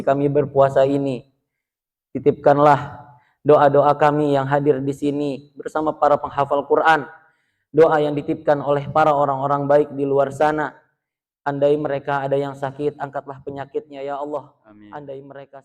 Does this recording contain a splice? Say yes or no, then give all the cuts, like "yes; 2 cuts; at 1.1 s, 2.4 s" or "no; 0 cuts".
no; 0 cuts